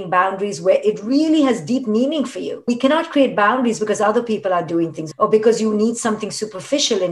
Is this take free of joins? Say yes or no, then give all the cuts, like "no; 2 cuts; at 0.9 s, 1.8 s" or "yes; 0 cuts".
no; 2 cuts; at 2.6 s, 5.0 s